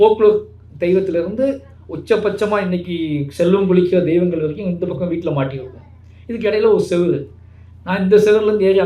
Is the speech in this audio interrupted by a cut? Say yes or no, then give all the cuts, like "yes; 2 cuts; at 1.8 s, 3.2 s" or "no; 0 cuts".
no; 0 cuts